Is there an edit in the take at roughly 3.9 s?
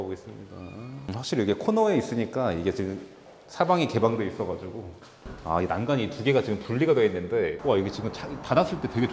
no; 1 cut; at 1.1 s

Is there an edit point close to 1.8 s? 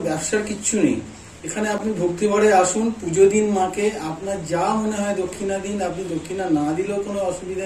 no; 0 cuts

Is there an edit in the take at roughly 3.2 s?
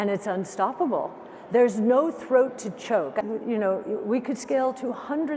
yes; 1 cut; at 3.2 s

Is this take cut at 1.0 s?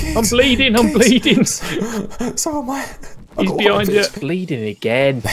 no; 1 cut; at 4.2 s

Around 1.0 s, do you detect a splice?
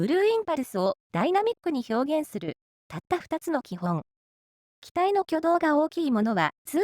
yes; 1 cut; at 1.0 s

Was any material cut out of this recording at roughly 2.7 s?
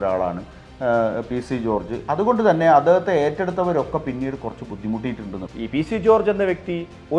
no; 1 cut; at 5.4 s

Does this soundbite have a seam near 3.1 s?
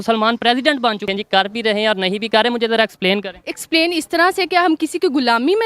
no; 1 cut; at 1.0 s

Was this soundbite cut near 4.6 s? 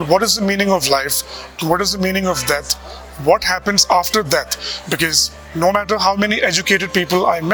no; 0 cuts

